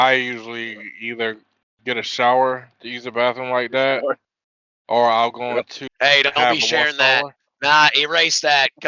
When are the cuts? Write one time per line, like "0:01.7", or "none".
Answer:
0:05.8

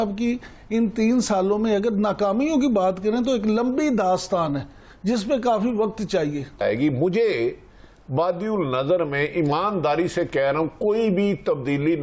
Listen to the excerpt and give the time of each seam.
0:06.6

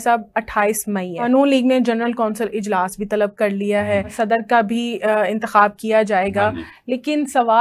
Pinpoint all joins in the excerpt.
0:01.3
0:04.1

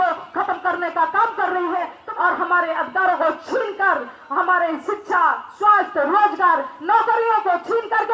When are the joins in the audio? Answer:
0:02.0

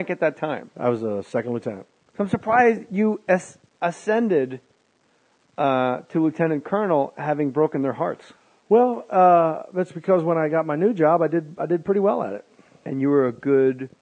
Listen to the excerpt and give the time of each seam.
0:09.0

